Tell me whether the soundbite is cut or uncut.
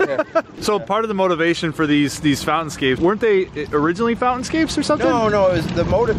cut